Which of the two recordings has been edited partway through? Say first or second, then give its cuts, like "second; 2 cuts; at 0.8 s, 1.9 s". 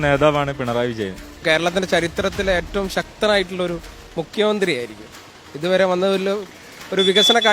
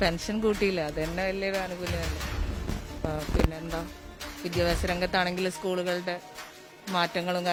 first; 1 cut; at 1.4 s